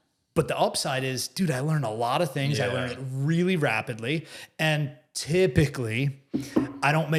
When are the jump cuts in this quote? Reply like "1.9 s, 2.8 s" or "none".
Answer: none